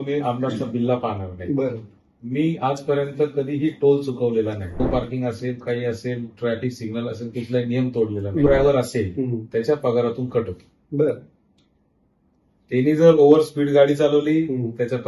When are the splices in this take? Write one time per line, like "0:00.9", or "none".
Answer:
0:04.8
0:08.5